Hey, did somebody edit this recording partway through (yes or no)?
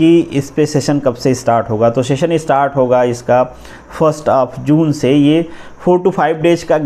no